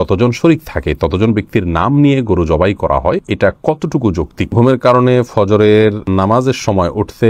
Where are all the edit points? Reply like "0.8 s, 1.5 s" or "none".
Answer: 3.3 s, 4.5 s, 6.0 s